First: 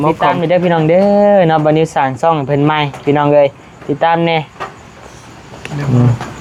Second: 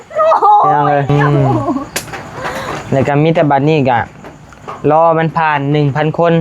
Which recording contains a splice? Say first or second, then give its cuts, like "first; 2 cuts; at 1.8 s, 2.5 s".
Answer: second; 1 cut; at 2.8 s